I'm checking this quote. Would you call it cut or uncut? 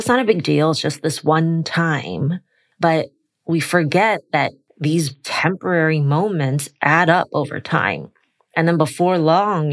cut